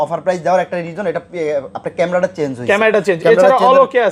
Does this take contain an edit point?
no; 0 cuts

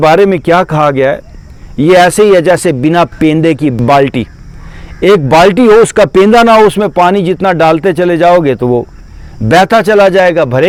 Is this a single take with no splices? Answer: yes; 0 cuts

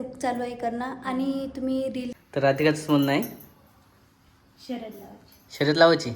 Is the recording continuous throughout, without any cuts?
no; 1 cut; at 2.2 s

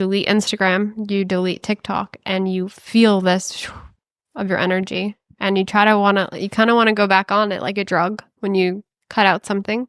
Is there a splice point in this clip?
no; 0 cuts

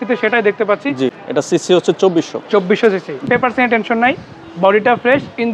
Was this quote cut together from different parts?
yes; 2 cuts; at 1.2 s, 3.3 s

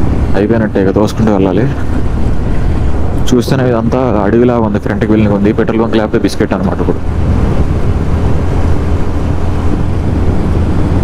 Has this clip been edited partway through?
no; 0 cuts

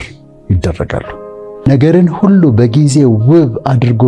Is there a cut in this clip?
yes; 1 cut; at 1.7 s

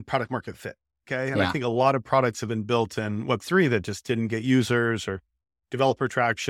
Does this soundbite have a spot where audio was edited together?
no; 0 cuts

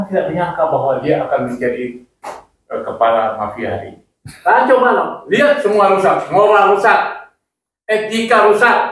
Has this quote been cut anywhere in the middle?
yes; 1 cut; at 4.3 s

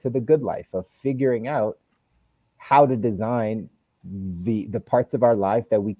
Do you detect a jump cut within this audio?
no; 0 cuts

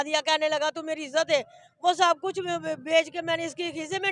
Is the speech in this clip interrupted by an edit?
no; 0 cuts

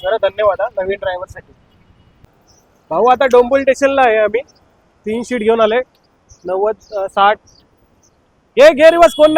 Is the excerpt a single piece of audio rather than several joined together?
yes; 0 cuts

